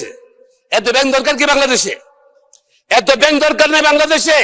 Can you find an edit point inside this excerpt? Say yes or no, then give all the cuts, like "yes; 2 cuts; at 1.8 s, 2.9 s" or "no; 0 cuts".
no; 0 cuts